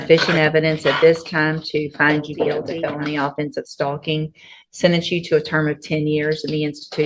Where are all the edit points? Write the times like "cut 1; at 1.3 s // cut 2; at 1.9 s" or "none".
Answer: cut 1; at 2.7 s